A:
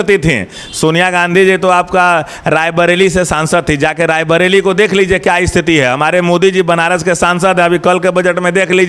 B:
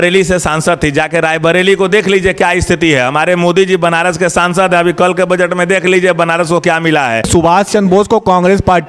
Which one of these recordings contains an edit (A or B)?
B